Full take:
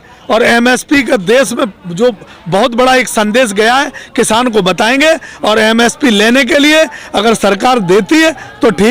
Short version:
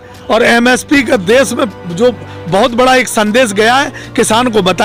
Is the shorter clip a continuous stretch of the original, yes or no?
yes